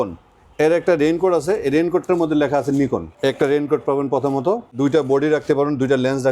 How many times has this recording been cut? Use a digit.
2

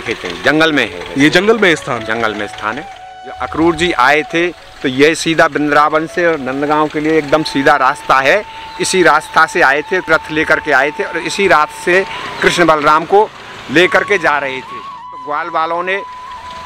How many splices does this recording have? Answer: 4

